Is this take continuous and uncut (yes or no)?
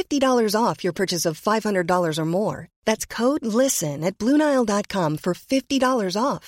yes